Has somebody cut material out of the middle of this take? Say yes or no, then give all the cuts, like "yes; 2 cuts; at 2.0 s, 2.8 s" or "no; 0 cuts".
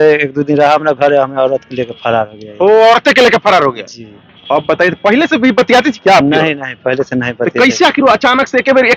no; 0 cuts